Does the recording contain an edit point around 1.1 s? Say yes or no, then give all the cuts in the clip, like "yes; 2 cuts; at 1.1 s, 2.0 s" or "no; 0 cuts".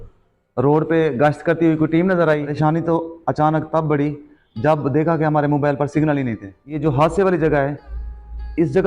no; 2 cuts; at 2.5 s, 6.8 s